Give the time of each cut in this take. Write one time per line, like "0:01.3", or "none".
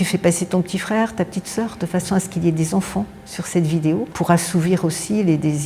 none